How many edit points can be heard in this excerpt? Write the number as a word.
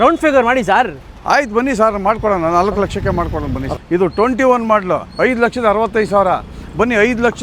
one